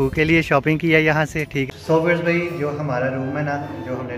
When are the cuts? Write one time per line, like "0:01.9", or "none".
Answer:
0:01.7